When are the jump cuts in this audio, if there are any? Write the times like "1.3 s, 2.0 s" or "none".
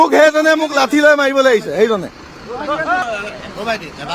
3.0 s